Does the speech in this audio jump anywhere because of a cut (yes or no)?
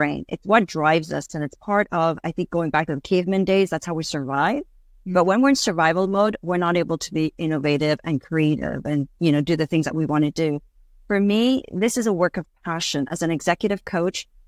no